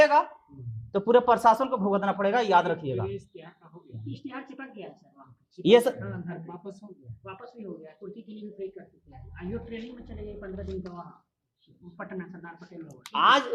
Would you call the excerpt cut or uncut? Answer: uncut